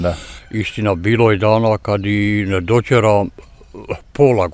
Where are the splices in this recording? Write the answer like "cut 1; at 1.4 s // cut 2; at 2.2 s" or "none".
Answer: none